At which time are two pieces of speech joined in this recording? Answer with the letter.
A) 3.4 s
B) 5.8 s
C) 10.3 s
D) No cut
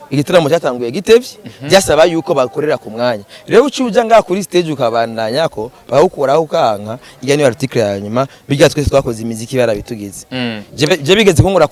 D